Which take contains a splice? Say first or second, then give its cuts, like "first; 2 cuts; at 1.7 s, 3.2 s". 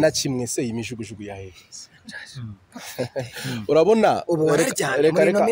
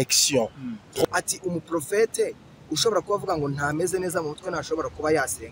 second; 1 cut; at 1.0 s